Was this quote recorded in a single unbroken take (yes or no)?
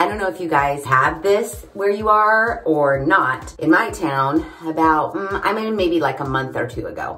yes